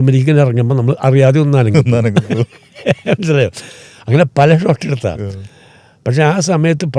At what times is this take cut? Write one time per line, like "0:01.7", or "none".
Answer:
none